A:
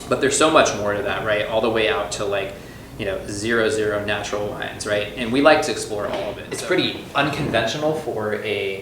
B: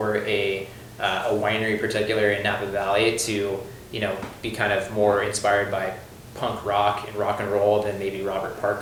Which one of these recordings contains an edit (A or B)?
A